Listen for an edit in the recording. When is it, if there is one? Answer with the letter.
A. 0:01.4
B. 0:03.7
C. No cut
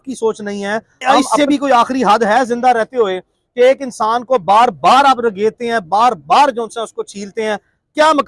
A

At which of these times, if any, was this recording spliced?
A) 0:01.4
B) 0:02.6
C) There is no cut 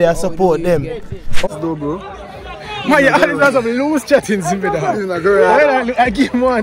A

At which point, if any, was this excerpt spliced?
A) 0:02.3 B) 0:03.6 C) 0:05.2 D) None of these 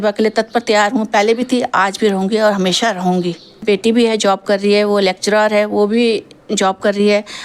B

